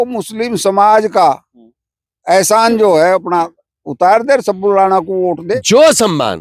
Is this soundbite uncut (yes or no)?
no